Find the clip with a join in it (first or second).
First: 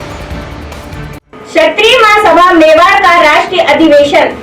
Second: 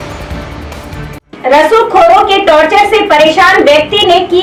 first